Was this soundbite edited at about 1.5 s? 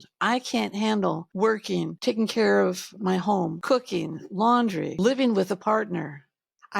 yes; 3 cuts; at 1.5 s, 3.0 s, 5.0 s

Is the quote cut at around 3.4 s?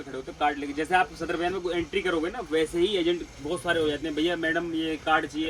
no; 0 cuts

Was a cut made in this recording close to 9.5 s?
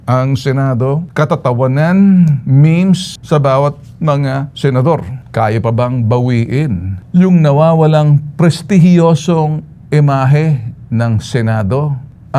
no; 4 cuts; at 1.1 s, 3.1 s, 5.2 s, 6.9 s

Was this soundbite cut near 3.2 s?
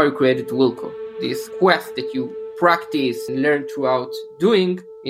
yes; 2 cuts; at 1.5 s, 3.2 s

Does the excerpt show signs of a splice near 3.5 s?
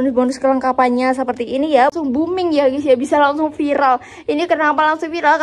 no; 1 cut; at 1.9 s

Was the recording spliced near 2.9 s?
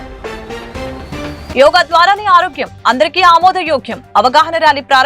no; 1 cut; at 1.5 s

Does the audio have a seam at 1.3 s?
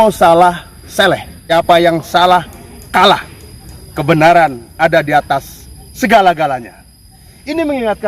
yes; 1 cut; at 1.3 s

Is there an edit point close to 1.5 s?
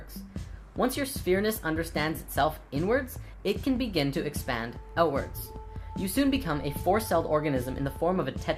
no; 0 cuts

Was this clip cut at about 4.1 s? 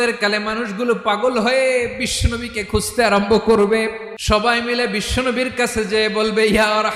yes; 1 cut; at 4.1 s

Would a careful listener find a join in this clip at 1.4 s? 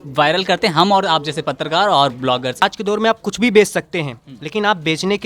no; 1 cut; at 2.6 s

